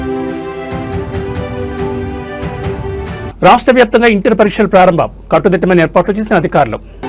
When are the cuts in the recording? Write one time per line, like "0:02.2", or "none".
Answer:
0:03.3